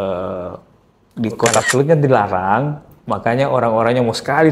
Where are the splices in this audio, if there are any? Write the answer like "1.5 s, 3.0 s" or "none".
1.6 s